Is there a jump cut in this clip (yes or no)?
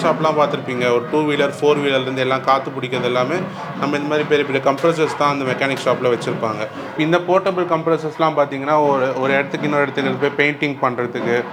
no